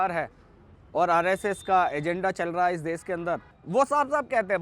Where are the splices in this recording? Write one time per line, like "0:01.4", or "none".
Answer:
0:03.5